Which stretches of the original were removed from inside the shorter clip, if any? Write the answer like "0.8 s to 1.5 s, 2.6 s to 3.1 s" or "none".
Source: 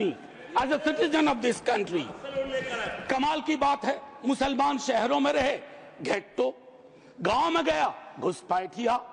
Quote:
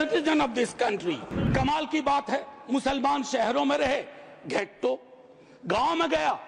2.2 s to 2.9 s